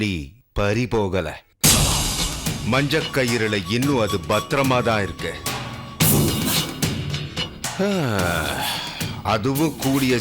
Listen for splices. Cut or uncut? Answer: uncut